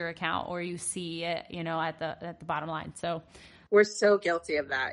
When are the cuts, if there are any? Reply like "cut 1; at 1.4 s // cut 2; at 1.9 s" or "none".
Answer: cut 1; at 3.7 s